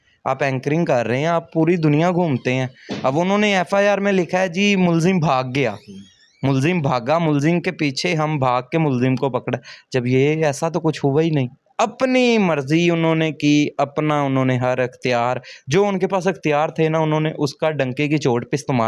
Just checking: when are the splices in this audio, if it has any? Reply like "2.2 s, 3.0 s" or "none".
11.6 s